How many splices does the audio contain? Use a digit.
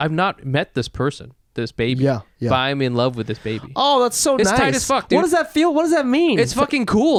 0